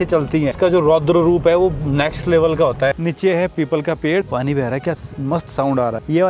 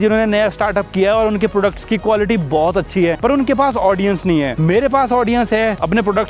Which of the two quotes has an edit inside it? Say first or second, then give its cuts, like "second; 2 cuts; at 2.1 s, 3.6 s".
first; 2 cuts; at 3.0 s, 4.3 s